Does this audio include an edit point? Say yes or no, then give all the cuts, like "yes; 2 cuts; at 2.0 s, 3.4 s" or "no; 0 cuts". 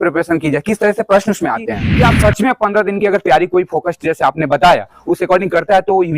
yes; 1 cut; at 1.8 s